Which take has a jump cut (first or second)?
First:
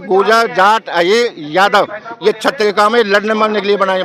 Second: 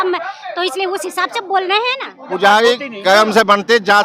second